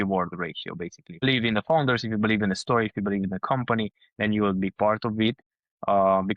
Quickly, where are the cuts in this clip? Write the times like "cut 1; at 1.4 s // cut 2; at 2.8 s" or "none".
cut 1; at 1.2 s